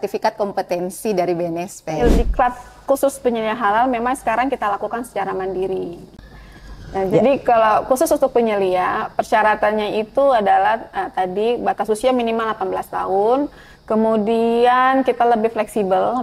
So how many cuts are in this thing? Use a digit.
1